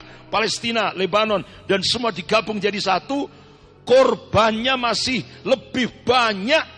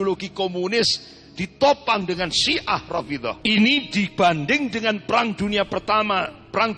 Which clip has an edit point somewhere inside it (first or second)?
second